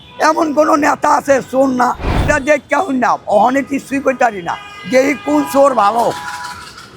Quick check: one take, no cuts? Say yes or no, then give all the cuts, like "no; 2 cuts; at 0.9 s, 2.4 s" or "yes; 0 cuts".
no; 1 cut; at 2.1 s